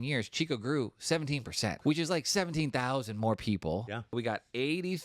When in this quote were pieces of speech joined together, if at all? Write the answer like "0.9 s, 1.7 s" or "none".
1.8 s, 4.1 s